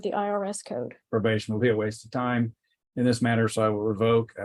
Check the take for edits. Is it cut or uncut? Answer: cut